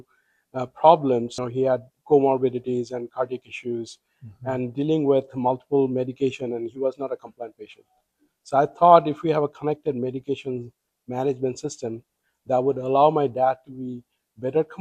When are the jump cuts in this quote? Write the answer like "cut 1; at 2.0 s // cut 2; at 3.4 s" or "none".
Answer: cut 1; at 1.4 s